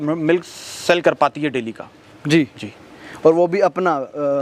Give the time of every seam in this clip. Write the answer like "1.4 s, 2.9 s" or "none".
none